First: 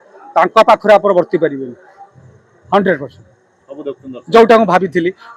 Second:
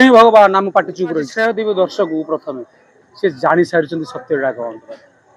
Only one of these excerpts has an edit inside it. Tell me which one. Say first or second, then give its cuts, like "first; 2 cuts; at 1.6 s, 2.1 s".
second; 1 cut; at 1.3 s